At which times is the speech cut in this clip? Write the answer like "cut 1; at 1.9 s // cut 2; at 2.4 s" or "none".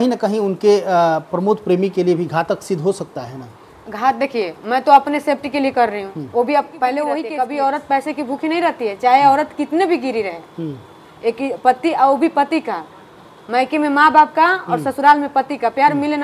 cut 1; at 7.3 s